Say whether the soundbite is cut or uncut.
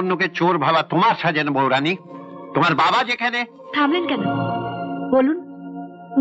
uncut